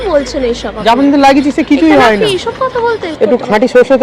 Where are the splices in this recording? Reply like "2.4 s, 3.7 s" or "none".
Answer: 3.1 s